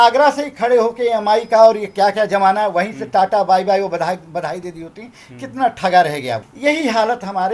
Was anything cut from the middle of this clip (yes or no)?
yes